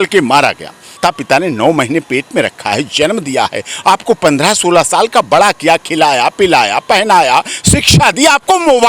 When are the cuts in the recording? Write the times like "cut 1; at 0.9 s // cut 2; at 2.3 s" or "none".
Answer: cut 1; at 1.0 s